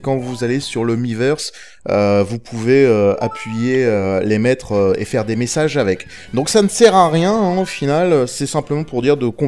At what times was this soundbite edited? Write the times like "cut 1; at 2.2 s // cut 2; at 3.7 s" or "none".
cut 1; at 6.1 s